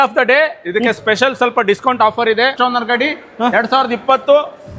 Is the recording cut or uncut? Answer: cut